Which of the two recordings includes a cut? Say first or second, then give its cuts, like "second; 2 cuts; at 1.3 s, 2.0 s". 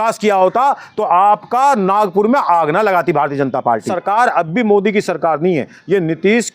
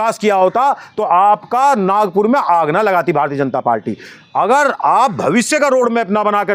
first; 1 cut; at 3.9 s